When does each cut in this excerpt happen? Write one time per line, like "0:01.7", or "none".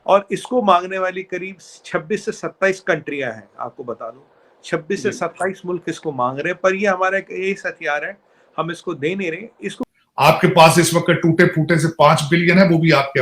0:09.9